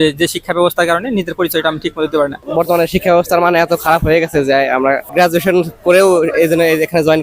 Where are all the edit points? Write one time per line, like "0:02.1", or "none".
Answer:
0:02.4
0:05.0